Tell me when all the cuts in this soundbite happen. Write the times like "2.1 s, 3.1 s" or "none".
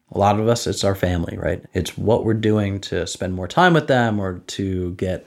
1.6 s